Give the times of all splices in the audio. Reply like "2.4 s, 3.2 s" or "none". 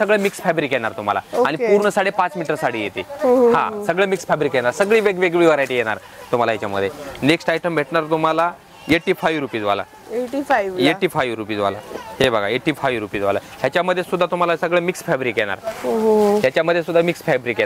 none